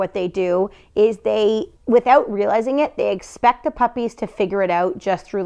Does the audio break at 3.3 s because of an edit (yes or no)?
no